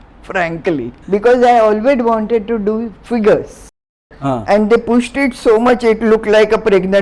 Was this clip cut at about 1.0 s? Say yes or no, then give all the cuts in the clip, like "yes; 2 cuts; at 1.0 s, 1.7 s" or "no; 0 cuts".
yes; 2 cuts; at 1.0 s, 4.0 s